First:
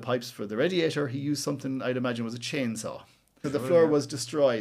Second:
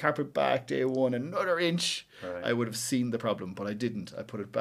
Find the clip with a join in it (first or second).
first